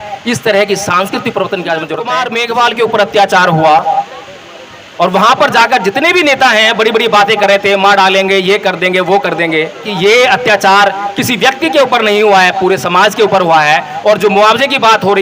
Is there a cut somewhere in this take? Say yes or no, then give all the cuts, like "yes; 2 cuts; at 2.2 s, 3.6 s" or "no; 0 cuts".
yes; 2 cuts; at 2.2 s, 9.9 s